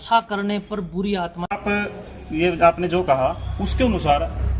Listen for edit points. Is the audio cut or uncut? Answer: cut